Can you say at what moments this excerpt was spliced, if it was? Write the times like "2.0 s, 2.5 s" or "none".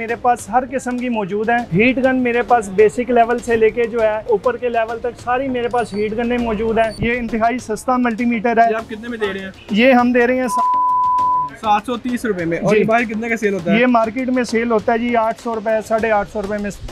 1.7 s, 4.3 s, 7.0 s